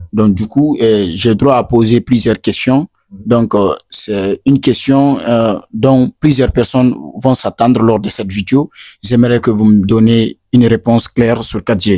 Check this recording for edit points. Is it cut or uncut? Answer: uncut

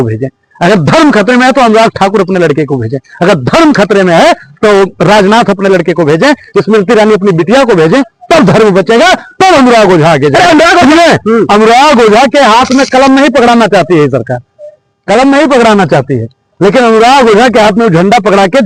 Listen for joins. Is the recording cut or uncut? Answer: uncut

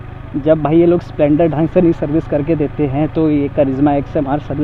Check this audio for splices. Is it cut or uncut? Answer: uncut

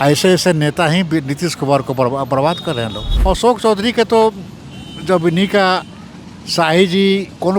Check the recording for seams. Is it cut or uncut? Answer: cut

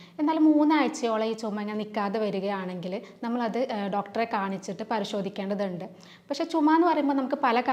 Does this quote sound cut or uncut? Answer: uncut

